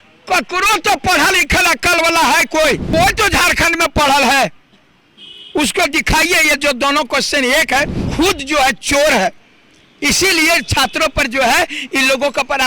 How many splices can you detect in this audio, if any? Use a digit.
2